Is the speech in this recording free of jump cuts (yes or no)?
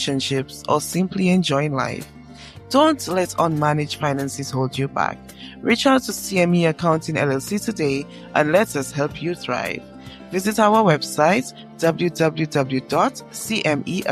yes